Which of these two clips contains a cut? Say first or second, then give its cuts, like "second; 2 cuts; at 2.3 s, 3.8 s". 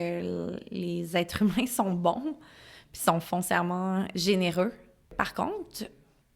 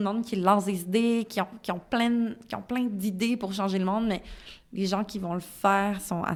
first; 2 cuts; at 4.1 s, 5.1 s